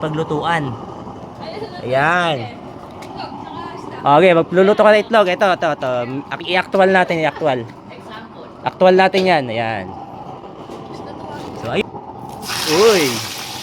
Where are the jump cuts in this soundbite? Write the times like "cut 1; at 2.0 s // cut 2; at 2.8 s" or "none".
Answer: cut 1; at 11.8 s